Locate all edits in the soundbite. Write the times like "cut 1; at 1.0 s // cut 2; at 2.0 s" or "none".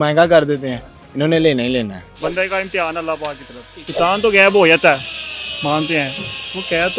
none